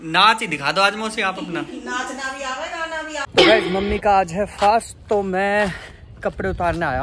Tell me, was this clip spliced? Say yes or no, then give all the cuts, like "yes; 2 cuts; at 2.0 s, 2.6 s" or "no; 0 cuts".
yes; 1 cut; at 3.2 s